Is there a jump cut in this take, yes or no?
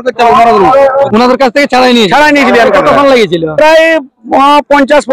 yes